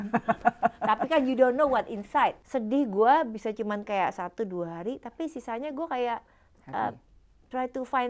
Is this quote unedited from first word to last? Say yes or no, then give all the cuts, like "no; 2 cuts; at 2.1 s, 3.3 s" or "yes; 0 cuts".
no; 1 cut; at 2.4 s